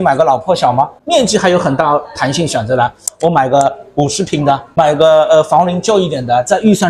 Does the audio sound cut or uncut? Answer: cut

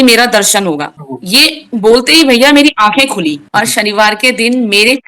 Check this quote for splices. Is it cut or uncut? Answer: cut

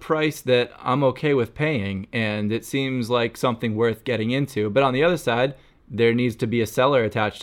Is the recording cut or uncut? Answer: uncut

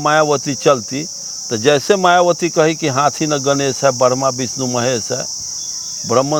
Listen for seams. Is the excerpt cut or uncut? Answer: uncut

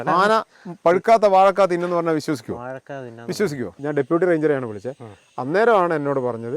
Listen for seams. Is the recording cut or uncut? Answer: cut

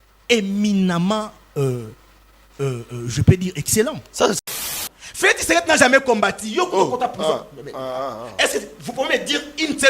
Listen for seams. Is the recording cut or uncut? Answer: cut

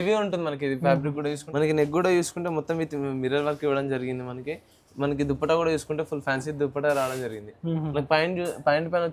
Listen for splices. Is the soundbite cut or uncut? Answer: cut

